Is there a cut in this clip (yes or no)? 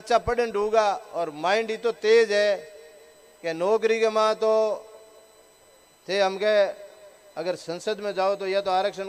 no